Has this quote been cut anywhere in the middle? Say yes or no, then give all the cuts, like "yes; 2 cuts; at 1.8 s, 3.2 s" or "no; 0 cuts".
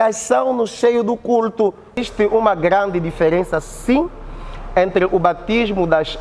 yes; 1 cut; at 2.0 s